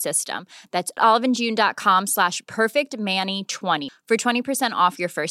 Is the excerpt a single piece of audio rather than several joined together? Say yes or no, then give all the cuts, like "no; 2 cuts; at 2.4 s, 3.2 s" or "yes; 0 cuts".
yes; 0 cuts